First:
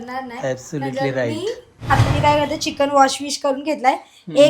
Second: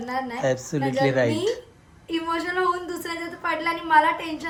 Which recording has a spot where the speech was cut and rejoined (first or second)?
first